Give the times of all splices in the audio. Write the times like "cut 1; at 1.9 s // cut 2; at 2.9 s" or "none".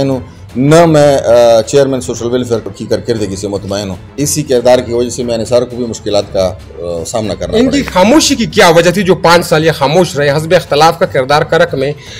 cut 1; at 2.8 s // cut 2; at 4.0 s